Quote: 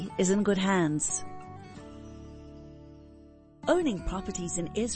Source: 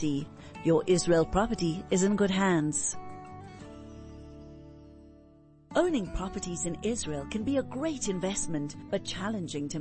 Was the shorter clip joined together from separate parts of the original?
yes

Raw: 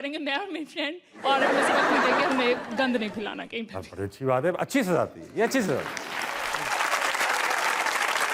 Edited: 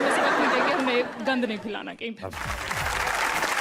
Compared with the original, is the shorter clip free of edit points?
no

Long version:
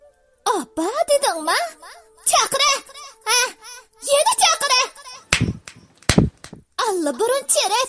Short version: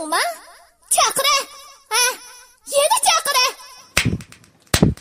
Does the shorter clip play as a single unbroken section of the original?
yes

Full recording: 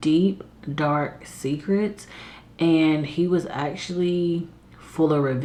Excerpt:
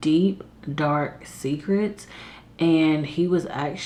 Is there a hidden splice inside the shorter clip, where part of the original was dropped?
no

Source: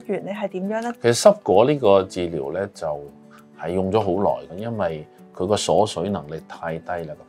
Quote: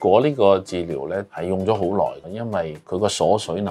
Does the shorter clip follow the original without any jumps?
no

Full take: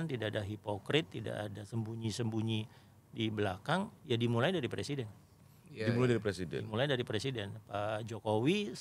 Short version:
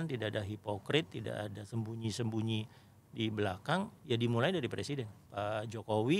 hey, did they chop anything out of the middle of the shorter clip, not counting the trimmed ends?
yes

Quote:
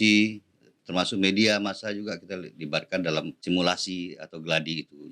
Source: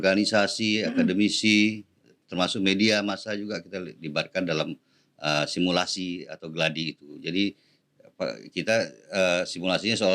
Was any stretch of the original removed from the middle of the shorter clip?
yes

